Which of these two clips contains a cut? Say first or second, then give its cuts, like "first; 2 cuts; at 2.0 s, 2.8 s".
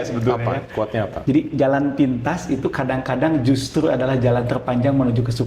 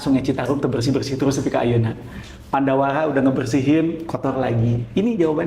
first; 1 cut; at 1.1 s